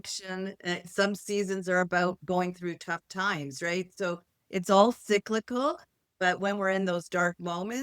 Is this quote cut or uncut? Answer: uncut